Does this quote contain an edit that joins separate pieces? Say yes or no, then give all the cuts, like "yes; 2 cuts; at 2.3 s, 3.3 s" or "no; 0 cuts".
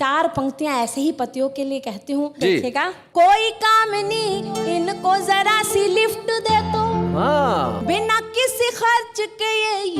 yes; 1 cut; at 3.1 s